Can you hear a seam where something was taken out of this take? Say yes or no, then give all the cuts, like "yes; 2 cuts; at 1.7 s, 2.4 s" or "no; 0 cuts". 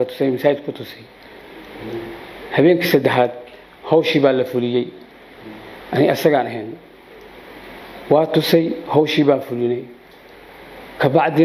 no; 0 cuts